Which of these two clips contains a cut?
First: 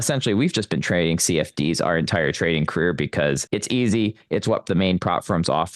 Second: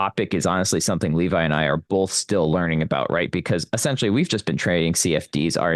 first; 2 cuts; at 3.4 s, 4.7 s

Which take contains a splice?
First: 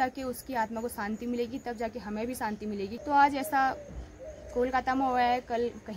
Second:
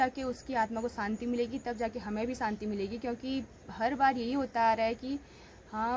first; 1 cut; at 3.0 s

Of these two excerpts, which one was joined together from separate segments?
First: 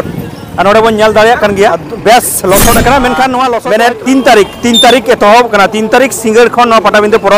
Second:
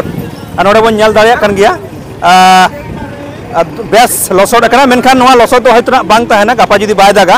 first; 2 cuts; at 1.9 s, 3.6 s

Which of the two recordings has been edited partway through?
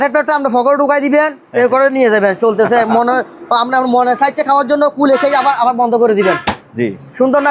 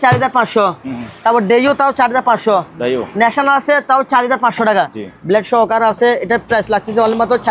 second; 1 cut; at 4.9 s

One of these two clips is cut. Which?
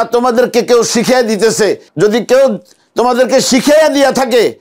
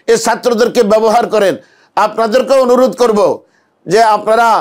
first; 1 cut; at 1.8 s

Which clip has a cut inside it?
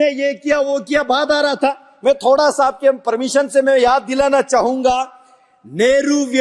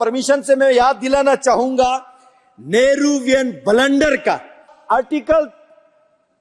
second; 1 cut; at 4.8 s

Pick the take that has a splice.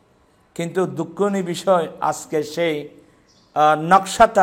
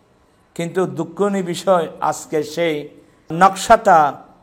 second; 1 cut; at 3.3 s

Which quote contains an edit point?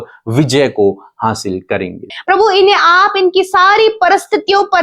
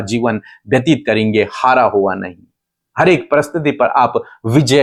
first; 1 cut; at 2.2 s

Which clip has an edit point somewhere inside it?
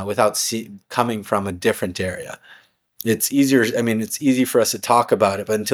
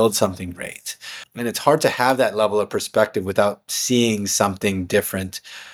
second; 1 cut; at 1.2 s

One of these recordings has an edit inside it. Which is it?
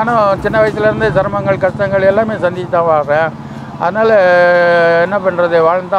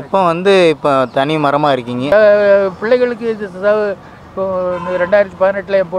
second; 1 cut; at 2.1 s

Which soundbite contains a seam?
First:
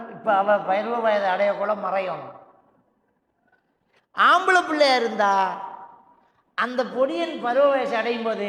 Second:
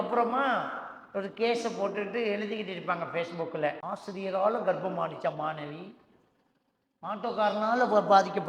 second; 1 cut; at 3.8 s

